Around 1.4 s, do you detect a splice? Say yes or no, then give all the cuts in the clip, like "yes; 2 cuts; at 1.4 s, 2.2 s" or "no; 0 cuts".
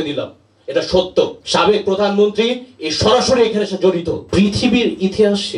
yes; 2 cuts; at 1.4 s, 4.2 s